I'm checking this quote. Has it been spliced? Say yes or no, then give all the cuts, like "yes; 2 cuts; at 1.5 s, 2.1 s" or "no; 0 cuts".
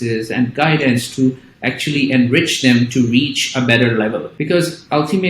yes; 1 cut; at 4.3 s